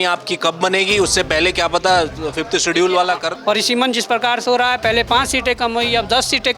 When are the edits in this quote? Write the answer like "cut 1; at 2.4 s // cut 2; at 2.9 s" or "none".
cut 1; at 3.3 s